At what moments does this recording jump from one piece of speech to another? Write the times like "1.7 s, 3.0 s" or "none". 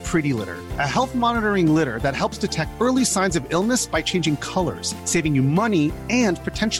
none